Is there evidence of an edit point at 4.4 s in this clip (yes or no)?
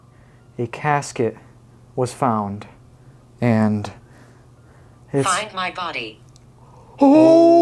no